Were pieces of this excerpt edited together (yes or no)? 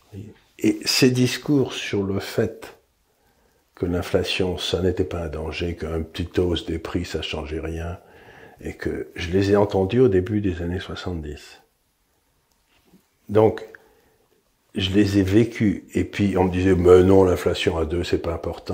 no